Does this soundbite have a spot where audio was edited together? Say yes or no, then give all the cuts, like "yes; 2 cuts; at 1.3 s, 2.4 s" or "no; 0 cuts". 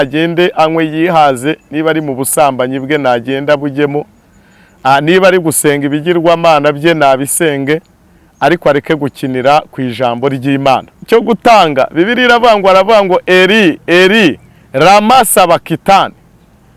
yes; 1 cut; at 11.0 s